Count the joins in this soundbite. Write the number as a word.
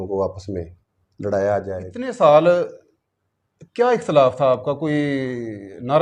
one